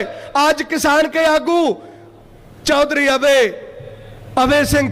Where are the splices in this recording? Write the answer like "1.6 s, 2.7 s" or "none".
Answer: none